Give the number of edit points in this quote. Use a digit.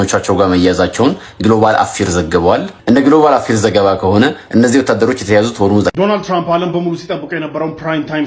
1